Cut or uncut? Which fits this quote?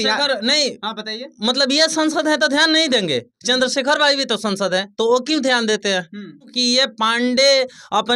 cut